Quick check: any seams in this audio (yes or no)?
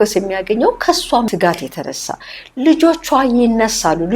yes